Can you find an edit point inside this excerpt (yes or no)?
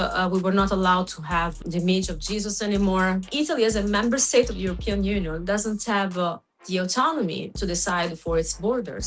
yes